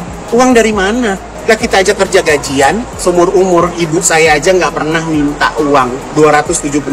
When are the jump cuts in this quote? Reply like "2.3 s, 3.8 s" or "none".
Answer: 1.3 s, 2.9 s, 6.0 s